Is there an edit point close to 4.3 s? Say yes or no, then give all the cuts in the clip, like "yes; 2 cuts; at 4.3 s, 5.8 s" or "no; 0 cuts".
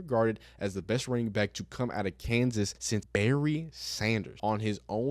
yes; 2 cuts; at 2.9 s, 4.3 s